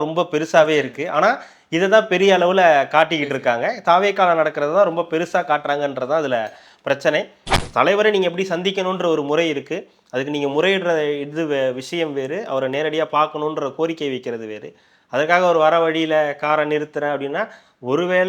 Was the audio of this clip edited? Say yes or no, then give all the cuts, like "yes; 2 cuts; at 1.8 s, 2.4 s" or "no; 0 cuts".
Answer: yes; 1 cut; at 7.4 s